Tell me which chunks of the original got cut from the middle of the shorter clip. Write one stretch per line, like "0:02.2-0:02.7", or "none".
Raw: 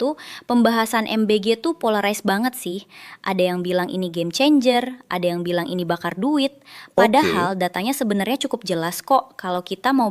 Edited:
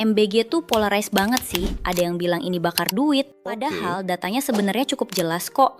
0:02.9-0:05.0
0:06.9-0:07.1